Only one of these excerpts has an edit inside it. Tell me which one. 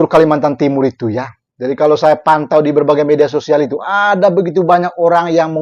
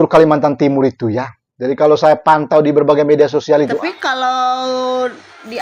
second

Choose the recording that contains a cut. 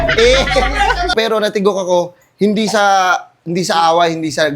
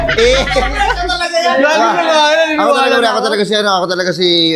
first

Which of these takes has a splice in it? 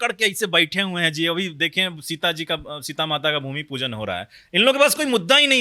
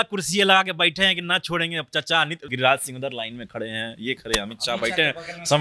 second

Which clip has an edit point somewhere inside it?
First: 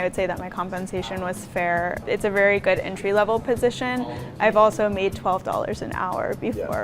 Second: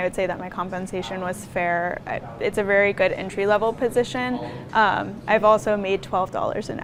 first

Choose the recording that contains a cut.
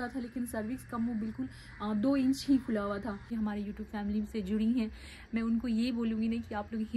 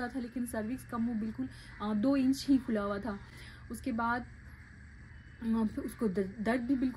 first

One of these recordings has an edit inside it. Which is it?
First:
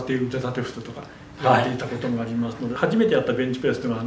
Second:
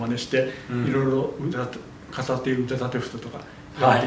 first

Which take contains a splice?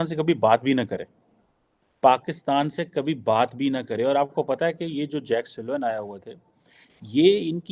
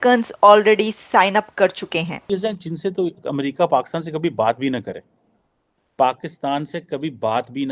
second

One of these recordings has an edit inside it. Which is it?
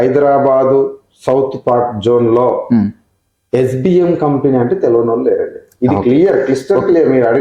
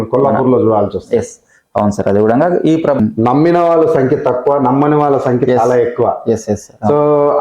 second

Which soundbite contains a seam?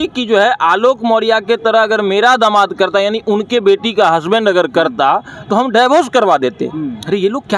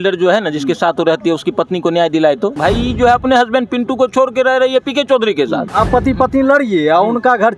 second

